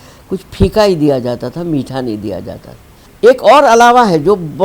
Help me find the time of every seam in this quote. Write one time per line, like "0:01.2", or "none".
none